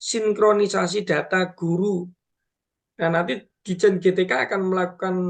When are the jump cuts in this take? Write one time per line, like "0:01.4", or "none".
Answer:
0:02.0